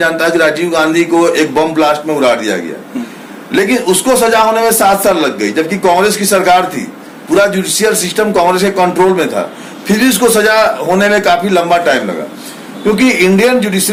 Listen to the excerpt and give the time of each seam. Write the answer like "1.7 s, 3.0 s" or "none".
none